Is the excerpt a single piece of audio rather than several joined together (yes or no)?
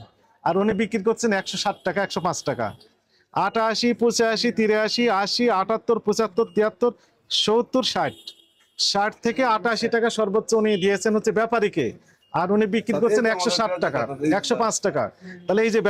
yes